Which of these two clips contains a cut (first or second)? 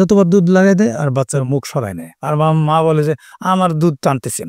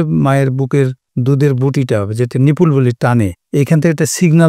second